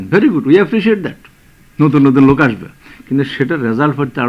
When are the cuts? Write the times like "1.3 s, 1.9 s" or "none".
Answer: none